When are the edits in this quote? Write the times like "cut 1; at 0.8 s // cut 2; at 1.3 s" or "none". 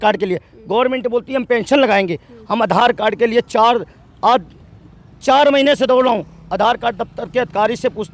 none